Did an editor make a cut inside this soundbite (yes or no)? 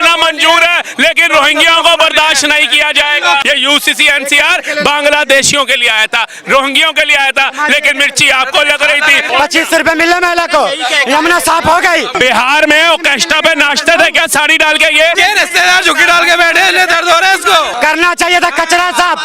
yes